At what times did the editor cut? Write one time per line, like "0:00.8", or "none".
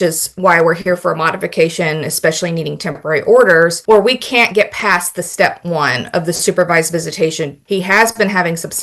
0:03.8
0:07.6

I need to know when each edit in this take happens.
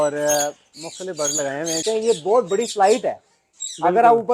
0:01.8

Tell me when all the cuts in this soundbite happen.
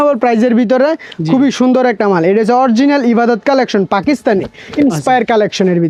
none

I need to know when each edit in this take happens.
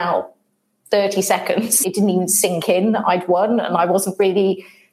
0:01.8

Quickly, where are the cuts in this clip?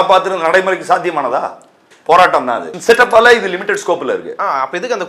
0:02.7

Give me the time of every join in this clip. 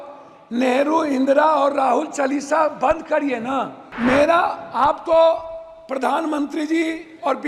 0:03.8

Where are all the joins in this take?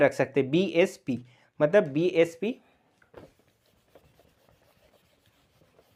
none

